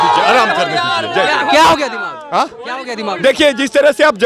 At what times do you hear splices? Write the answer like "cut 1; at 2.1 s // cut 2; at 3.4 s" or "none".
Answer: none